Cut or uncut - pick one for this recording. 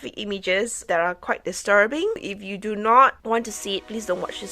cut